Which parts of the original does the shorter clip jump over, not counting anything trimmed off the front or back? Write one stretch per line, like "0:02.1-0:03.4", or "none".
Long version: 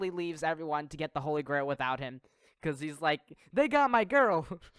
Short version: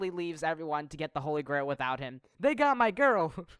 0:02.2-0:03.4